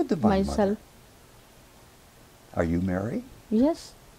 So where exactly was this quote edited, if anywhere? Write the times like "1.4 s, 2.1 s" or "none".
none